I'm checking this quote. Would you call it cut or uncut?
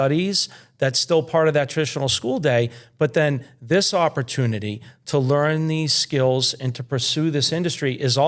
uncut